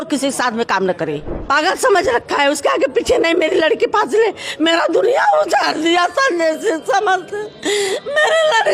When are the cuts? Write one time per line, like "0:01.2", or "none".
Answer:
0:01.3